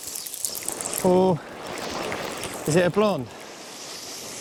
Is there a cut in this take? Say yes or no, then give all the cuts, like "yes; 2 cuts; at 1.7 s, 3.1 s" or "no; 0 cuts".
no; 0 cuts